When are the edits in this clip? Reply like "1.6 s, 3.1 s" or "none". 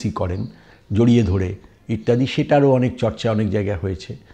none